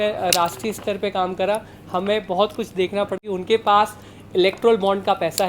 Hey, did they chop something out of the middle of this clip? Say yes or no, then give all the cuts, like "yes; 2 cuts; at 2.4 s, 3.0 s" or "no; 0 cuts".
yes; 1 cut; at 3.2 s